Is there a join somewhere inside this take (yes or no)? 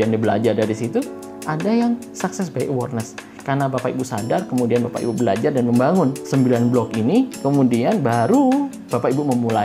yes